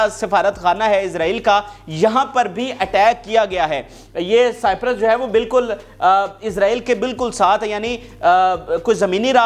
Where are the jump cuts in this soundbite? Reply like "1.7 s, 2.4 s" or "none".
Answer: none

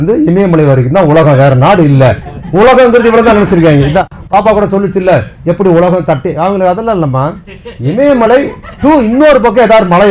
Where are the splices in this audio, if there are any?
none

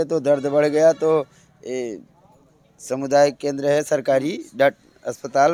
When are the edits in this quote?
none

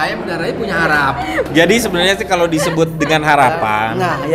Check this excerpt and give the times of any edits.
1.4 s

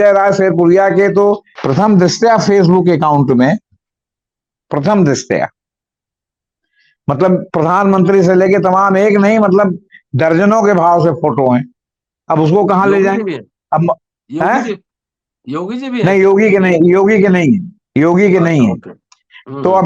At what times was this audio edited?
none

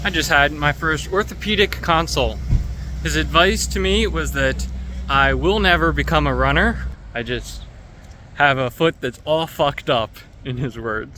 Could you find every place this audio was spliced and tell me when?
6.9 s

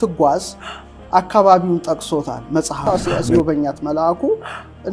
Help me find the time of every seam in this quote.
2.9 s

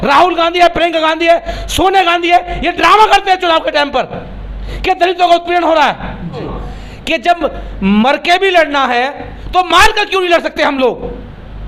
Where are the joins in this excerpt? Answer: 6.5 s

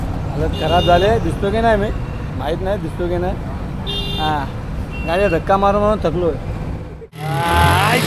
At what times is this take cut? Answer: 7.1 s

